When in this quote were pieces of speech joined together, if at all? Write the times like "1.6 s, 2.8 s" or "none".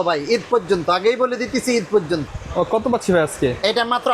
2.2 s